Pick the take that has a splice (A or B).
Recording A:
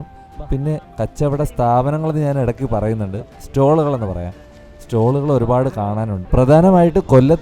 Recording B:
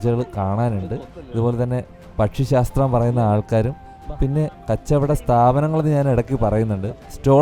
A